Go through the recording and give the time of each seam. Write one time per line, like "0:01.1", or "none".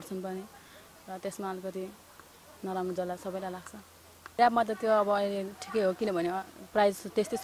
0:04.4